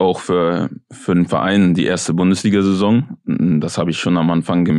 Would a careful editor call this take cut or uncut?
uncut